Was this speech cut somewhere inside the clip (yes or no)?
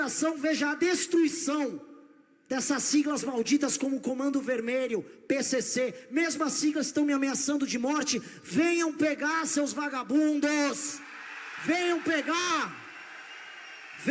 no